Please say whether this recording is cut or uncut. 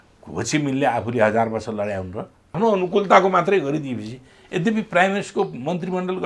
cut